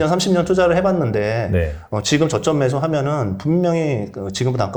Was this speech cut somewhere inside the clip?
no; 0 cuts

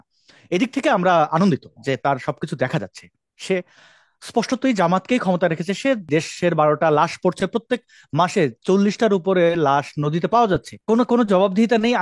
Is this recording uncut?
no; 2 cuts; at 6.1 s, 10.7 s

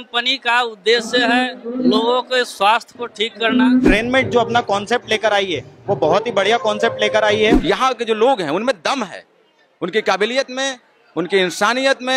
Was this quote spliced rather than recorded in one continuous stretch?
yes; 2 cuts; at 3.9 s, 7.6 s

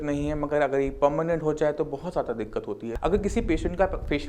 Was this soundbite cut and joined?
yes; 1 cut; at 3.0 s

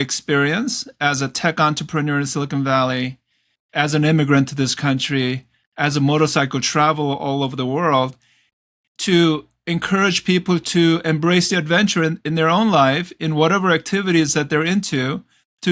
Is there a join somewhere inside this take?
no; 0 cuts

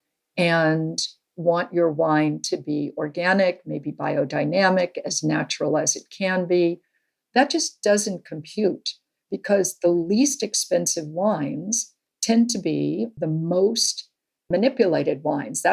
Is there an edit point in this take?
no; 0 cuts

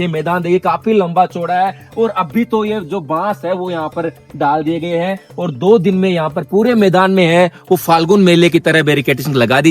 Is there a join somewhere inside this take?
no; 0 cuts

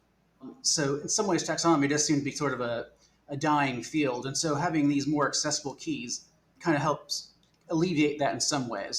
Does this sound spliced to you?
no; 0 cuts

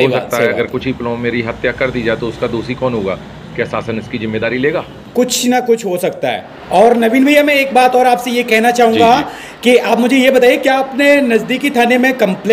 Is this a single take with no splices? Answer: yes; 0 cuts

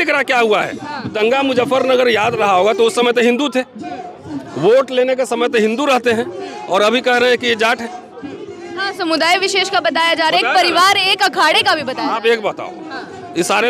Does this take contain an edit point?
yes; 1 cut; at 1.1 s

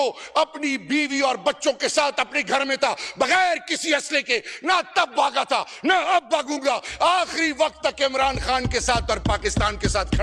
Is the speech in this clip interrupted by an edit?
no; 0 cuts

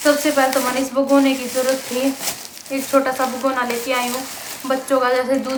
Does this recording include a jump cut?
no; 0 cuts

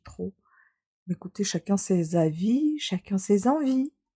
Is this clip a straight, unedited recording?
yes; 0 cuts

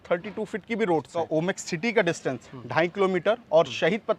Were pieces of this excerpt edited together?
yes; 1 cut; at 1.3 s

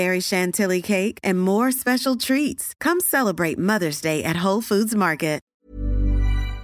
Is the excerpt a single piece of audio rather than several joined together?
no; 1 cut; at 5.5 s

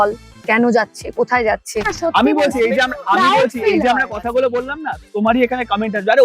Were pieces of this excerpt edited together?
yes; 2 cuts; at 1.9 s, 5.0 s

